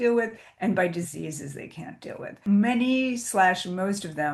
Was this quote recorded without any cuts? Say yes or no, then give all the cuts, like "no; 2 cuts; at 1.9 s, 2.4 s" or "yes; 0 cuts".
no; 1 cut; at 2.4 s